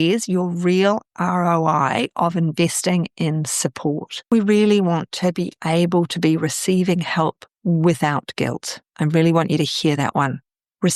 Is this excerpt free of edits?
no; 3 cuts; at 4.2 s, 7.5 s, 8.9 s

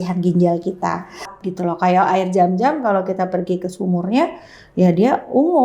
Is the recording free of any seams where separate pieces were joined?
no; 1 cut; at 1.3 s

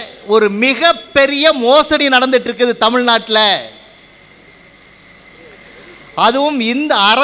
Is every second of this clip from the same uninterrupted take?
yes; 0 cuts

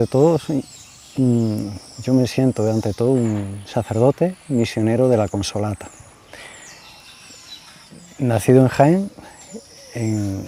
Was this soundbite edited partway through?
no; 0 cuts

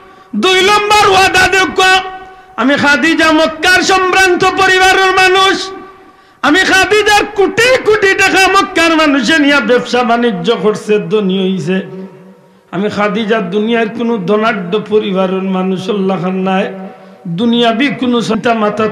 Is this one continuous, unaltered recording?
yes; 0 cuts

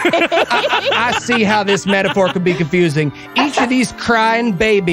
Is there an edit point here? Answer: no; 0 cuts

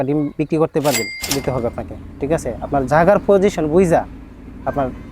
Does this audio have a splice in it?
yes; 1 cut; at 1.2 s

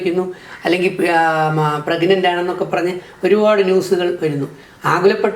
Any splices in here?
no; 0 cuts

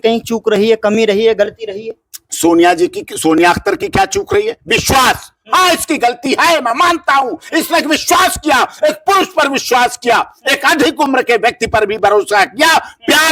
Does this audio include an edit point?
no; 0 cuts

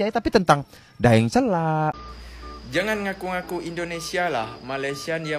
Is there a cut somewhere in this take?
yes; 1 cut; at 2.0 s

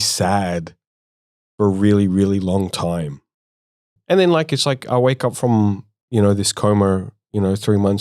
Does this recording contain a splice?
yes; 1 cut; at 3.9 s

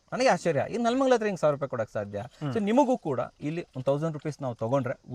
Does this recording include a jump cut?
no; 0 cuts

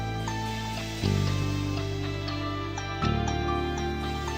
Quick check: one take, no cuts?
yes; 0 cuts

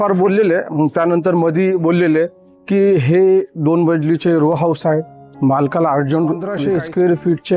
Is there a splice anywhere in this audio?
yes; 1 cut; at 6.5 s

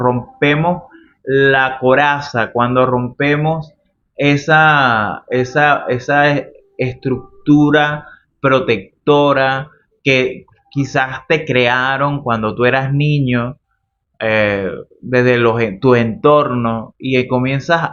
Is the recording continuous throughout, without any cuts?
yes; 0 cuts

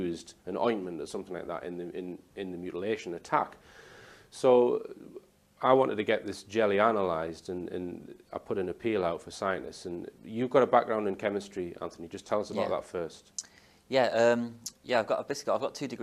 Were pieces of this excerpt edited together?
no; 0 cuts

